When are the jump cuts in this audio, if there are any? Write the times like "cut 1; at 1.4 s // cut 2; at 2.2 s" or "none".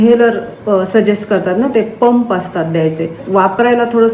cut 1; at 3.2 s